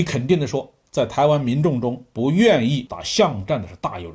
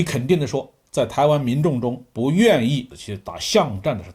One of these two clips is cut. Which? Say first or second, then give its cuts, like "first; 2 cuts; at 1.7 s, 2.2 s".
first; 1 cut; at 3.0 s